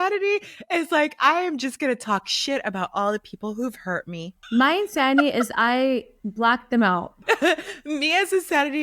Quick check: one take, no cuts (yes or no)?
no